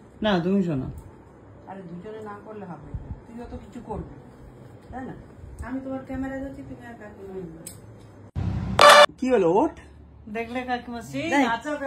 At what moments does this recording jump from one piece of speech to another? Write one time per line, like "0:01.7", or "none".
0:09.0